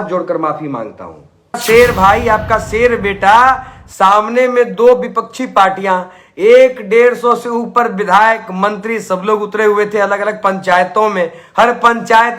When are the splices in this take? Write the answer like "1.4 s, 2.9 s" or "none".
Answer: 1.6 s